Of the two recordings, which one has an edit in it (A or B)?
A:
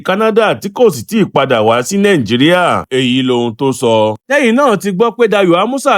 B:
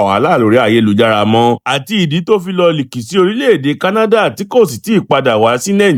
A